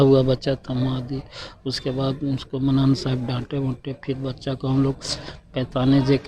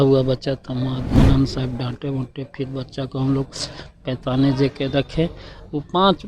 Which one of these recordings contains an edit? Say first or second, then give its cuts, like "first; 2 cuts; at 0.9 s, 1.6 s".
second; 1 cut; at 1.2 s